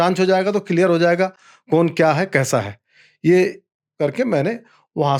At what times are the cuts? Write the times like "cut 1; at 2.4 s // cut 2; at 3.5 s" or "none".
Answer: none